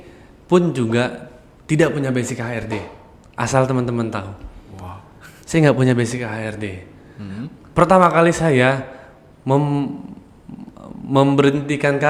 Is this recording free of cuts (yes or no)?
yes